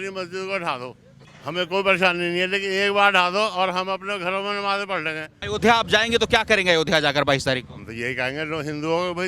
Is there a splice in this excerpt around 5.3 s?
yes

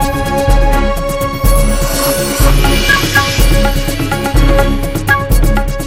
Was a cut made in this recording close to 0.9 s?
no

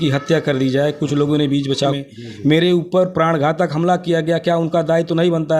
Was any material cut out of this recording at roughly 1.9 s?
yes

